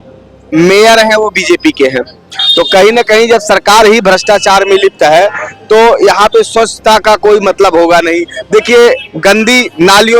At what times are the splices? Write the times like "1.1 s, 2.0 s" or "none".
none